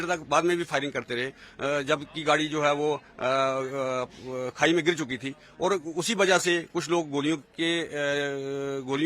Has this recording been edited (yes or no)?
no